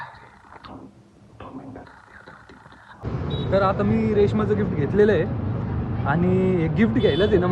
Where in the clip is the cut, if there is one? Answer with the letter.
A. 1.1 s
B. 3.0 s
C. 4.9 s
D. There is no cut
B